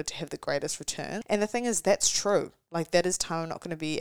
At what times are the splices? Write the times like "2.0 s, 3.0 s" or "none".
1.2 s